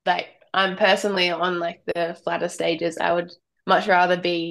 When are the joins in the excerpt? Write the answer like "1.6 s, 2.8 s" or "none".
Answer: none